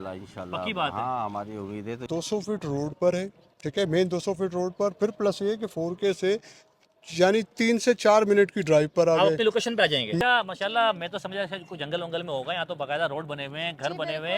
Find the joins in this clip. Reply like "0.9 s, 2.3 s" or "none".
2.0 s, 10.2 s